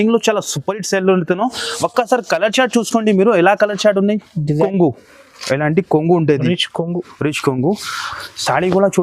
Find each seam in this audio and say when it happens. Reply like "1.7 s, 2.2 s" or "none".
4.6 s